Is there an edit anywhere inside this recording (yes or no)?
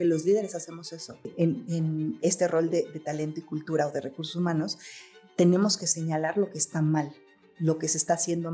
yes